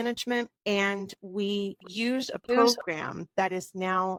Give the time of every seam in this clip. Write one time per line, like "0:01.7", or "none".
none

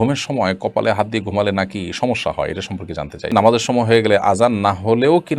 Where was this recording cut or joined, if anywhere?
0:03.3

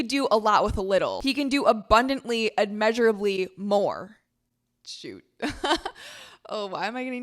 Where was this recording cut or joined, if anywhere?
0:04.1

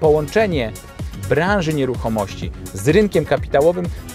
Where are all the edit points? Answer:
none

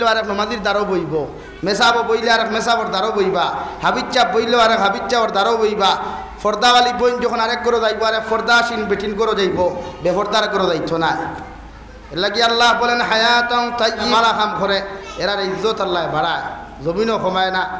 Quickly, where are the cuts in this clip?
0:14.1

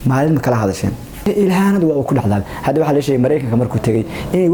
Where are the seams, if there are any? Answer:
0:01.3

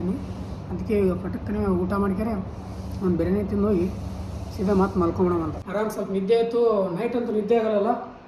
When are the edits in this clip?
0:05.6

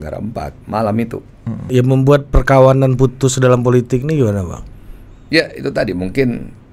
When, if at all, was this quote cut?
0:01.6

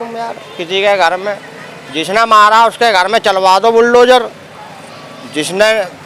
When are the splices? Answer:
none

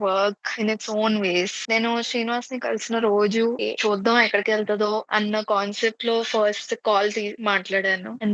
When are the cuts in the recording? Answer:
0:01.6
0:03.6

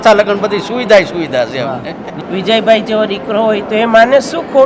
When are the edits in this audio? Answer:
0:02.2

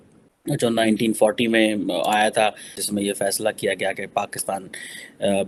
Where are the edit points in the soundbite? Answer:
none

